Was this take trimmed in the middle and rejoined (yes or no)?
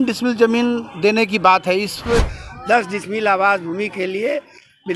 yes